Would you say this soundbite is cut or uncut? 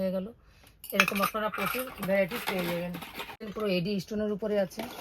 uncut